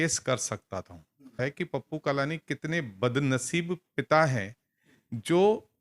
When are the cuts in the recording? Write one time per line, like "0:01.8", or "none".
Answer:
0:01.4